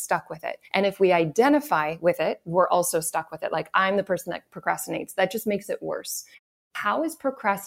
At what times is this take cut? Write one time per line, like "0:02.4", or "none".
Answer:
0:06.5